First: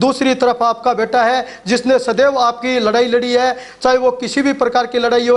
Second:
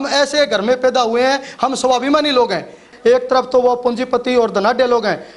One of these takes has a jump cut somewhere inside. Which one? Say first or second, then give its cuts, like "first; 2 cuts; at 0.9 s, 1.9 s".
second; 1 cut; at 2.9 s